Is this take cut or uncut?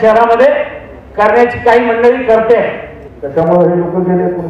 cut